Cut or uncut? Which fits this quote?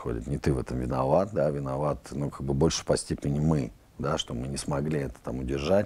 uncut